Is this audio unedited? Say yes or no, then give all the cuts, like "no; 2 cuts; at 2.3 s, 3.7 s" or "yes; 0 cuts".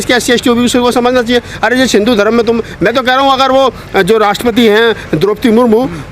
yes; 0 cuts